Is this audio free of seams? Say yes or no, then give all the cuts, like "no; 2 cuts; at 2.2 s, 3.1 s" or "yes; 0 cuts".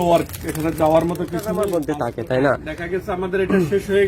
no; 1 cut; at 1.6 s